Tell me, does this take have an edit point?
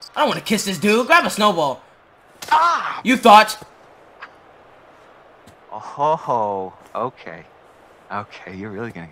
no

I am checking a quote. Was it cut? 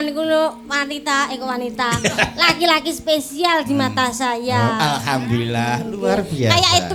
no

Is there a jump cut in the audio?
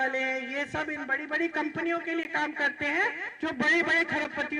yes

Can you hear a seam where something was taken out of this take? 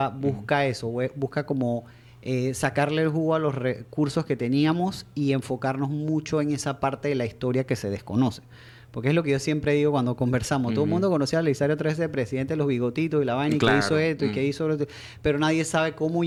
no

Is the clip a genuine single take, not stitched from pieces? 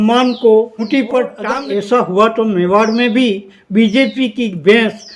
no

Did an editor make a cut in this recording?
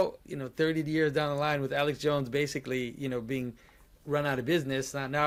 no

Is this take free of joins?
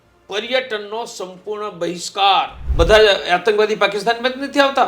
no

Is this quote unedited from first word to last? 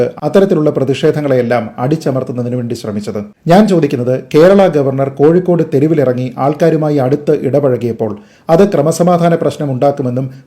no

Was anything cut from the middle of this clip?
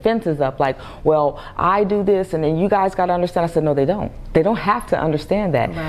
no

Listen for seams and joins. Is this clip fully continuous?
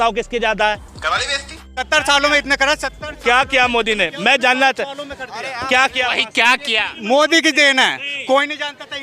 no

